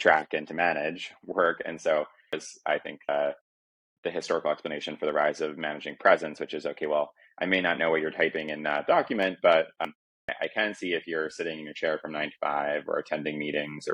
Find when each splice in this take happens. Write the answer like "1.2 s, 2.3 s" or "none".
2.5 s, 9.8 s

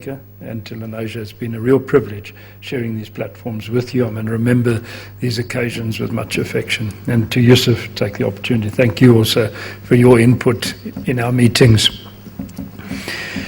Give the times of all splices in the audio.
9.8 s

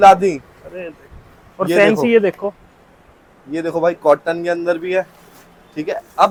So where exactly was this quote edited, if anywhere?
none

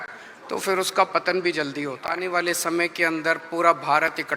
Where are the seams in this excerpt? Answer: 2.2 s

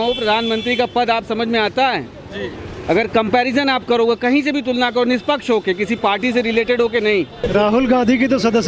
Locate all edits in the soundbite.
7.4 s

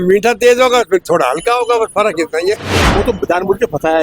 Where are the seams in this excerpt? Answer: 2.8 s

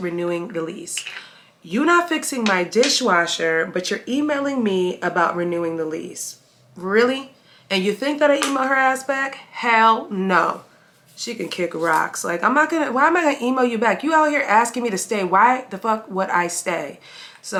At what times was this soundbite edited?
none

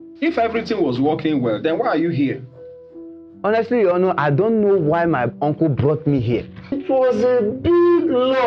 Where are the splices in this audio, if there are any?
6.8 s

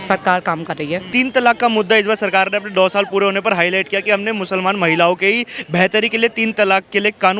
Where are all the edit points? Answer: 1.1 s

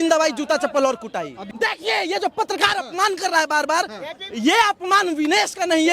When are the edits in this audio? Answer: 1.4 s

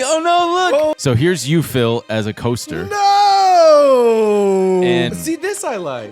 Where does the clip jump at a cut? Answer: 1.0 s, 5.1 s

